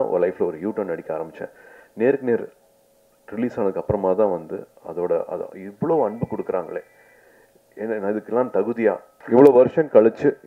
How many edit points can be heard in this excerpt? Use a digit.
1